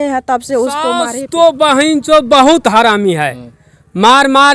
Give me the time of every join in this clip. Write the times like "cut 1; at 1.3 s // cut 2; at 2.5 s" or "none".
cut 1; at 1.1 s